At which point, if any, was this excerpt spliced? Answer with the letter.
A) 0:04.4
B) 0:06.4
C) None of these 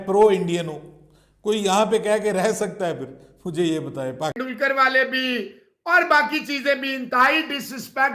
A